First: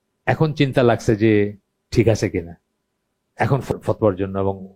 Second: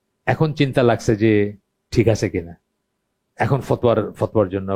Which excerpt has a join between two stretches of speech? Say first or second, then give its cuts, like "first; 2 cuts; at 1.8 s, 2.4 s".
first; 1 cut; at 3.7 s